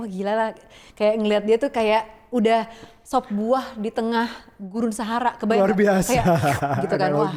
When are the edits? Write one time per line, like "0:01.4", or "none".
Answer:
none